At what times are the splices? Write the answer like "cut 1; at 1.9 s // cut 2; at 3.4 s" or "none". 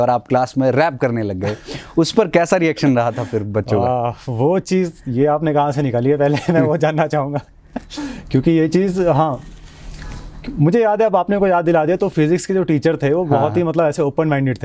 none